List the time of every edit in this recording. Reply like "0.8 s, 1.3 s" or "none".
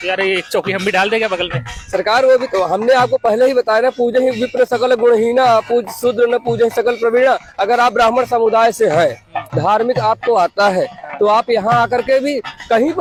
none